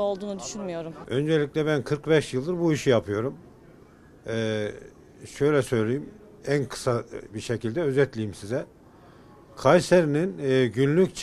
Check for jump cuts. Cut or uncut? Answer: uncut